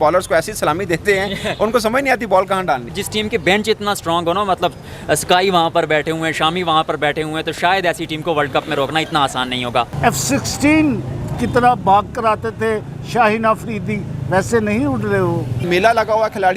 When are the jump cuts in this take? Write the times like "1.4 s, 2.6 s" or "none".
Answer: 3.0 s, 9.9 s, 15.6 s